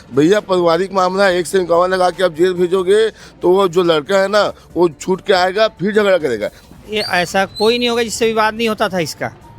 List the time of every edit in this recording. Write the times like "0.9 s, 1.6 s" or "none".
6.6 s